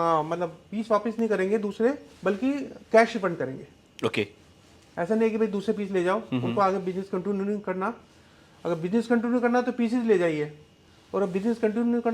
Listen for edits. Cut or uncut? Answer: uncut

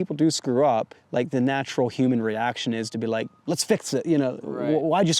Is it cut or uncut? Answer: cut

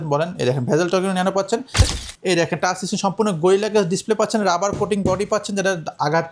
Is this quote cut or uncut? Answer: cut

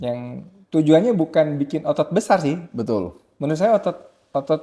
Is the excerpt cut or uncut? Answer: uncut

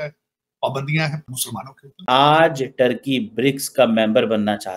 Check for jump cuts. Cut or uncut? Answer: cut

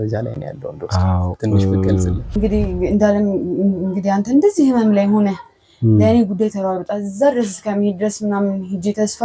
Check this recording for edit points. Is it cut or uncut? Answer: cut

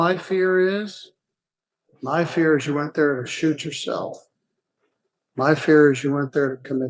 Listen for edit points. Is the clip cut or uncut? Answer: uncut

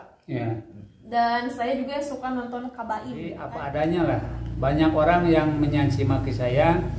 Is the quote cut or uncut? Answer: cut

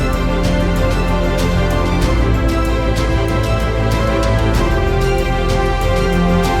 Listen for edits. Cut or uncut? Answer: cut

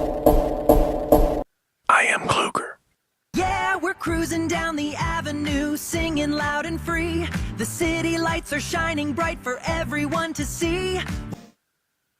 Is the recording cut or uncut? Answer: cut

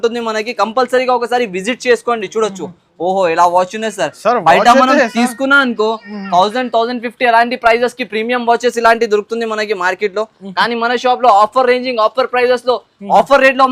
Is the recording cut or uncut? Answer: uncut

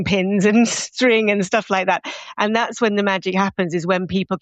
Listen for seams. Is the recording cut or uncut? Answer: uncut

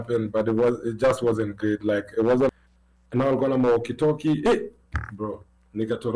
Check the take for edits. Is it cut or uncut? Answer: cut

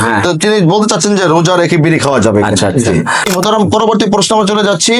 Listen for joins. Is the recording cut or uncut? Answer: cut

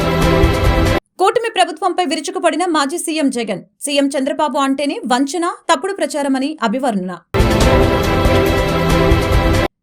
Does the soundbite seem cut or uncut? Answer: cut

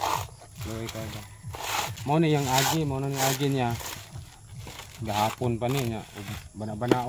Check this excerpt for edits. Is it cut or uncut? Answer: uncut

